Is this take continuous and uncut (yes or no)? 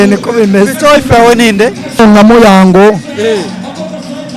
no